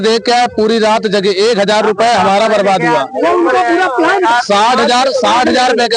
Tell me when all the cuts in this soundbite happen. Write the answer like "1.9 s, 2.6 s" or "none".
none